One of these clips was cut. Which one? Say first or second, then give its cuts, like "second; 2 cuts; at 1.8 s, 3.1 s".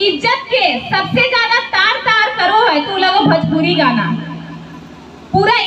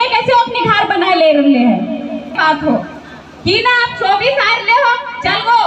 second; 1 cut; at 2.3 s